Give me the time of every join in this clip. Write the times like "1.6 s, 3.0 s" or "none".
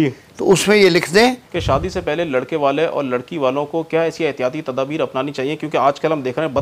1.5 s